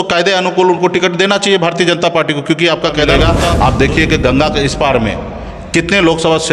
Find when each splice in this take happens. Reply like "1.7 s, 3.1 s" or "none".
3.2 s